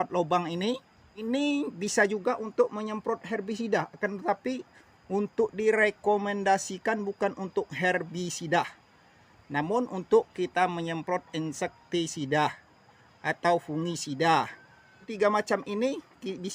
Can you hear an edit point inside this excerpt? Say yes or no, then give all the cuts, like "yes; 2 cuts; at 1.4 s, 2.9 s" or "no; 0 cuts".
yes; 1 cut; at 15.1 s